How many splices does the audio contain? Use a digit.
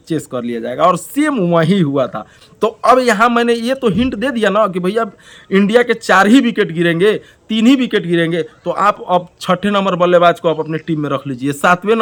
0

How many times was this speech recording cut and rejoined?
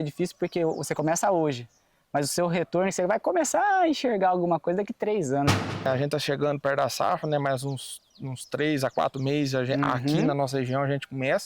1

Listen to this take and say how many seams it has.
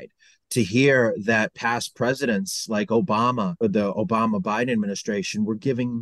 1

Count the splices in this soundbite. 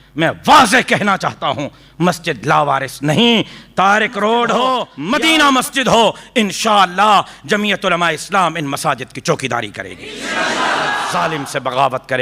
2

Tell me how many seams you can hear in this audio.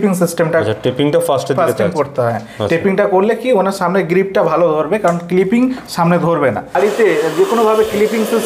1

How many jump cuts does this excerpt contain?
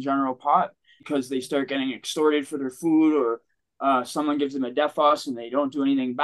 1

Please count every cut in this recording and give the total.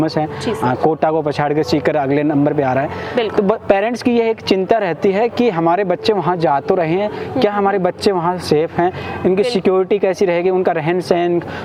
0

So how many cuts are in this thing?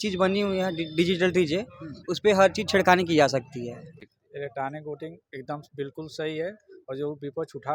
1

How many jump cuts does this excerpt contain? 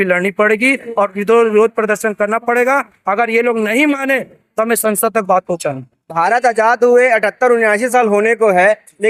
0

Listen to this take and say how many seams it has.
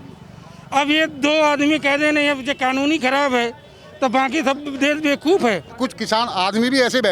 1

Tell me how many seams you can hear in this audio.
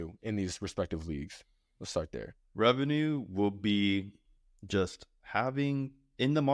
1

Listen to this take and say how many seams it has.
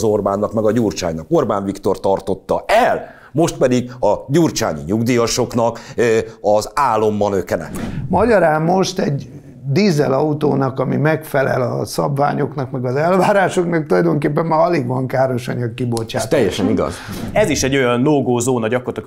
2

